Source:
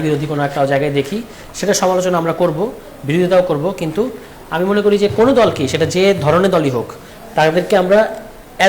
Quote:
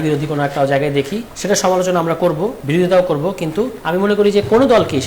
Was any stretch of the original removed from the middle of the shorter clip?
yes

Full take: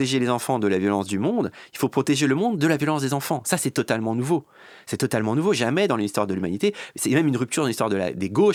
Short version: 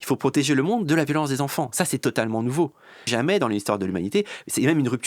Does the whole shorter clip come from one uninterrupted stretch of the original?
no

